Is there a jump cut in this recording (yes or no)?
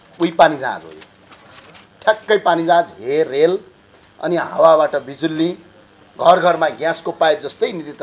no